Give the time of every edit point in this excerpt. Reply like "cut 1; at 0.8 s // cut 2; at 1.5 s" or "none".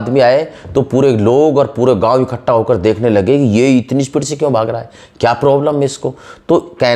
none